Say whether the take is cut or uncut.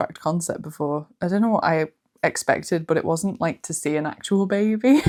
uncut